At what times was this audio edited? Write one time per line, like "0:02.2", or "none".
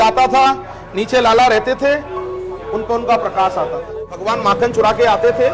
0:04.2

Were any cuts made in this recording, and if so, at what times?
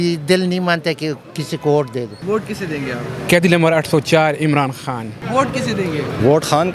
0:02.1
0:05.1

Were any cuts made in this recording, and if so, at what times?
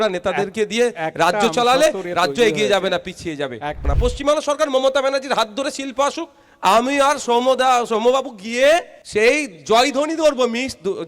0:03.9

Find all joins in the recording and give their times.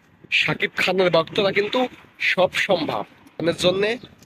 0:03.3

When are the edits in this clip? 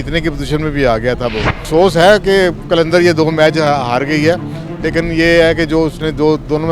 0:01.6

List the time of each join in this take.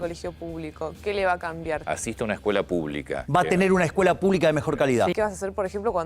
0:01.8
0:03.2
0:05.1

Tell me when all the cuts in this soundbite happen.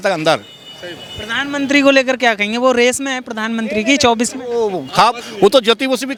none

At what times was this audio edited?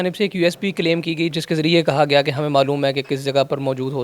0:01.4

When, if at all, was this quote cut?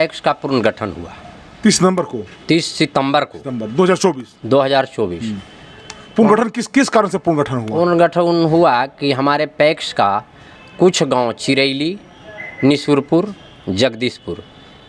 none

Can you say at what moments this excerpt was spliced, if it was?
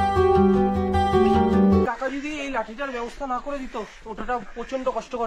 0:01.9

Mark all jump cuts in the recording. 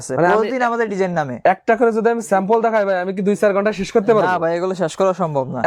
none

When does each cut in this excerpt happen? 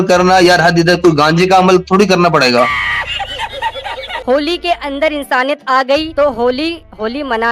0:04.2

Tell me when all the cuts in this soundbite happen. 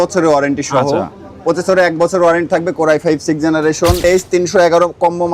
0:04.0

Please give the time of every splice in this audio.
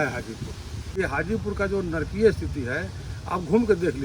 0:01.0

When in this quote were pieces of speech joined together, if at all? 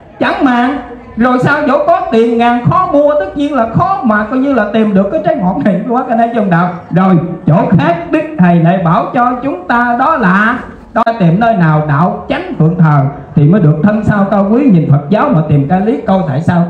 0:10.9

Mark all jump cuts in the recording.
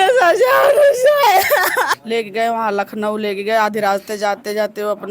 0:02.0

